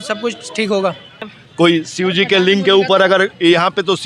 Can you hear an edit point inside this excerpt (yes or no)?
yes